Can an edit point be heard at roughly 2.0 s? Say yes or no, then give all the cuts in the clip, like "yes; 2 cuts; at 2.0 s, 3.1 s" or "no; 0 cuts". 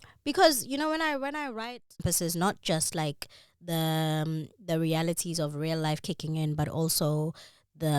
yes; 1 cut; at 2.0 s